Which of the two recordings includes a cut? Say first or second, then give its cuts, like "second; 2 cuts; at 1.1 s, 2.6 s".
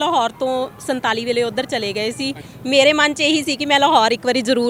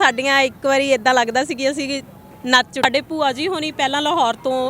second; 1 cut; at 2.9 s